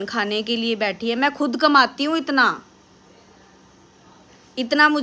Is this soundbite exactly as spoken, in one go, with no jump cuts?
yes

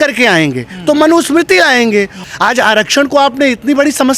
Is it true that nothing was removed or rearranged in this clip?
no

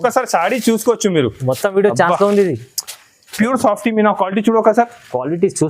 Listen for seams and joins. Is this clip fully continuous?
no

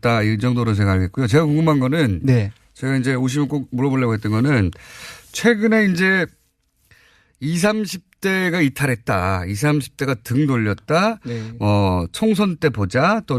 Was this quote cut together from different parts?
no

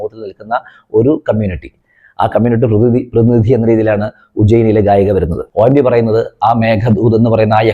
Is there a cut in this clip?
yes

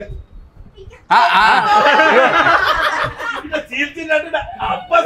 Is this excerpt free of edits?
yes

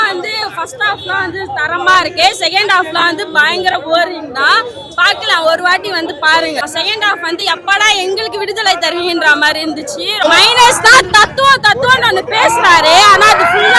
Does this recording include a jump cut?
yes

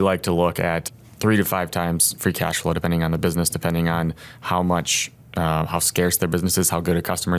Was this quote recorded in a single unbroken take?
no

